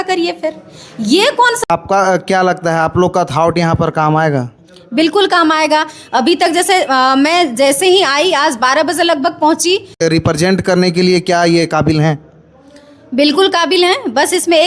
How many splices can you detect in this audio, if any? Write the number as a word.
two